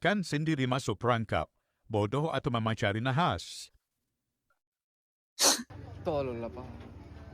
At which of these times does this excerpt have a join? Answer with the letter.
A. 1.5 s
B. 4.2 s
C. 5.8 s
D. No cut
C